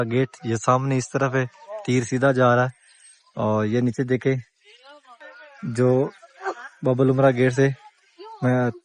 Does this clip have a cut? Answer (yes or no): no